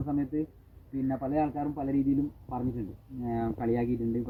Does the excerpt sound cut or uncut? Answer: uncut